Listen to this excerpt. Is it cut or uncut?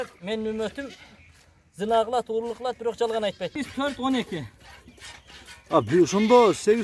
cut